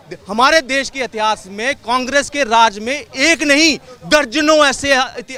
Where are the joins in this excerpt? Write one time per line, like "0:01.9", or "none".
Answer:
none

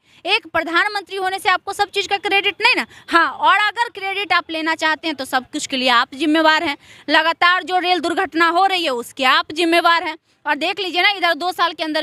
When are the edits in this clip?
none

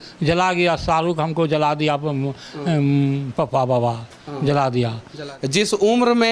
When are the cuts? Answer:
0:05.3

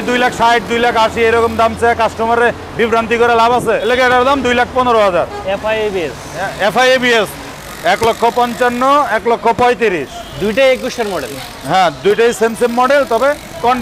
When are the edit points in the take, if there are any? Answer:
0:03.8
0:07.6

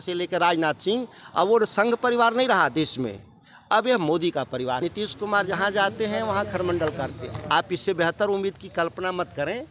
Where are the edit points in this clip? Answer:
0:04.8
0:07.3

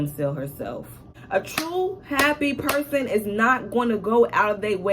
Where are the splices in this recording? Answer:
0:01.0

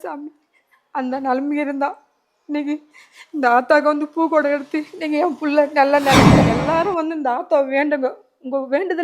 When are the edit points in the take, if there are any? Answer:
0:06.5

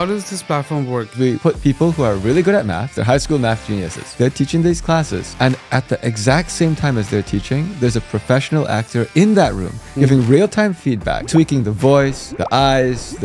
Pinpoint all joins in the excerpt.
0:01.1
0:02.9
0:04.0

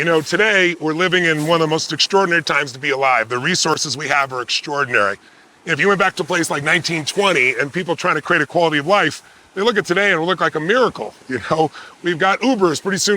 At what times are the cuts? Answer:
0:01.0

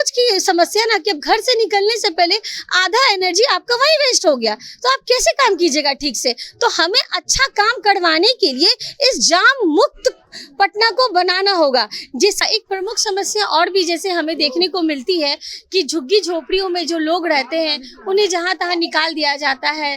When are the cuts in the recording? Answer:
0:12.4

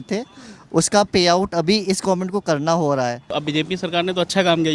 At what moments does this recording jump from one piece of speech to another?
0:03.4

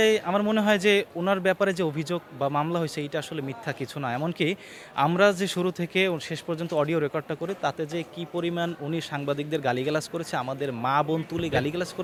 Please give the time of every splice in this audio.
none

